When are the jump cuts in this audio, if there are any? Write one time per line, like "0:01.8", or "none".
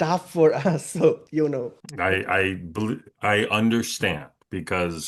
none